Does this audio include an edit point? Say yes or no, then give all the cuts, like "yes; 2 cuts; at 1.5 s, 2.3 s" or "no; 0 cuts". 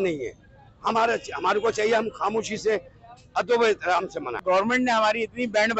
yes; 1 cut; at 4.4 s